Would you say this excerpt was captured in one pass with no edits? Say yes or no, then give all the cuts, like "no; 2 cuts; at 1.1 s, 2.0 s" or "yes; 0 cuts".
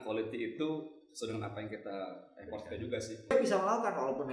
no; 1 cut; at 3.3 s